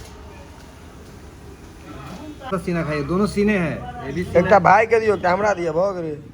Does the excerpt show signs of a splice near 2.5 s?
yes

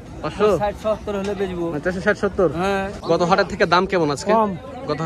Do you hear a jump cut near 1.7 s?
no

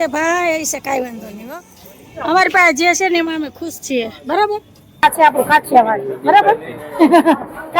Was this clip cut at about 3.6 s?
no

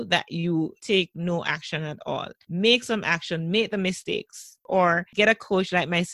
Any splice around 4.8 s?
yes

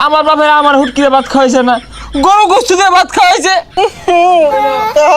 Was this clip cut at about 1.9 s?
no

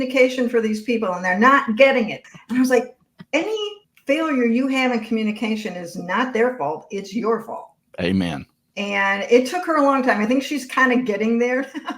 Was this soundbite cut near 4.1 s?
no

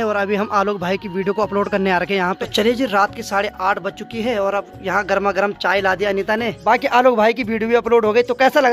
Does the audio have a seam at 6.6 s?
yes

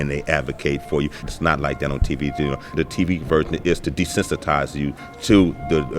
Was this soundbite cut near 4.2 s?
no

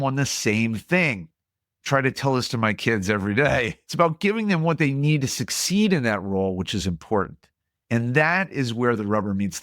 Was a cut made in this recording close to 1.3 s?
no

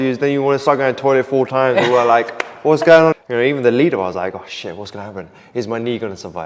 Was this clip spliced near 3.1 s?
yes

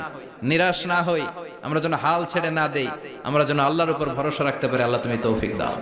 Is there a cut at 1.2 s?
no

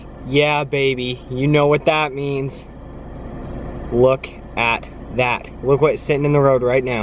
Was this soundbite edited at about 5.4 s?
no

